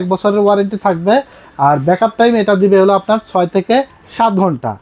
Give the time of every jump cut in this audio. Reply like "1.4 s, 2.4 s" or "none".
none